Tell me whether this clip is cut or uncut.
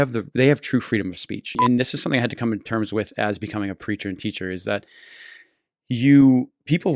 cut